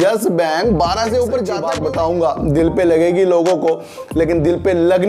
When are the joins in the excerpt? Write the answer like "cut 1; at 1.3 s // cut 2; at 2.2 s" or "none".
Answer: cut 1; at 1.6 s